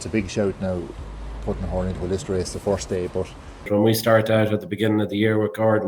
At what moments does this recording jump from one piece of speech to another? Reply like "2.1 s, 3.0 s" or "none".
3.6 s